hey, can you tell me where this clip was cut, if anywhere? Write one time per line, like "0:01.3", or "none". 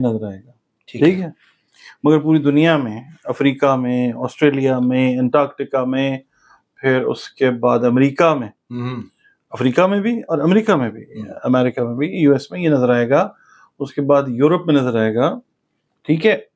none